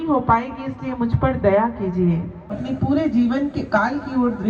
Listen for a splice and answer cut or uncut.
cut